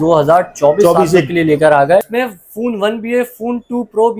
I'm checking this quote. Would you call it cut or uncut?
cut